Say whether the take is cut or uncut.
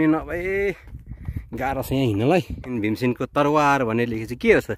cut